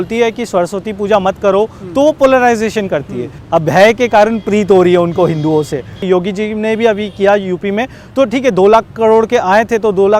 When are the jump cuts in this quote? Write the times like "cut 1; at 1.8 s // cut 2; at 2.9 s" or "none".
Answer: cut 1; at 3.3 s // cut 2; at 6.0 s